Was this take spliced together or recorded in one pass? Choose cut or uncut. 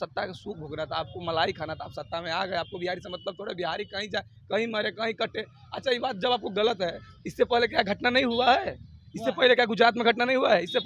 uncut